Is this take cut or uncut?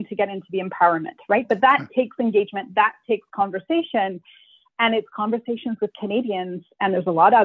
uncut